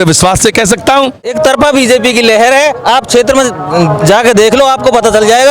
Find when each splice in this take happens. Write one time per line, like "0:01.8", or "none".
0:01.3